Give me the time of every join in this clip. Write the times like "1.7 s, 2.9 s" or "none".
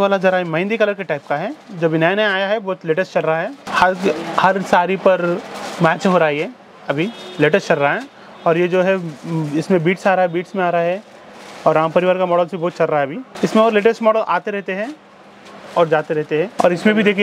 none